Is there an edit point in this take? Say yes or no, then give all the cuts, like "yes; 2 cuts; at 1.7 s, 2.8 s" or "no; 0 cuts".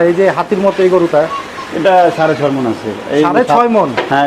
no; 0 cuts